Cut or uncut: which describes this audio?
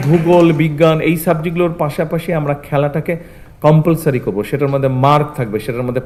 uncut